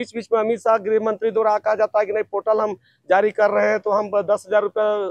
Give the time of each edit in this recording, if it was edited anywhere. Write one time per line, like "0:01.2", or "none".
none